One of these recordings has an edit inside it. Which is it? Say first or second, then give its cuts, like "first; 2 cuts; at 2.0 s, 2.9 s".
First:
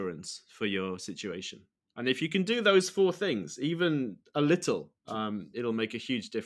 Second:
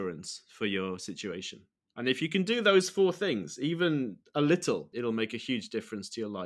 second; 1 cut; at 4.9 s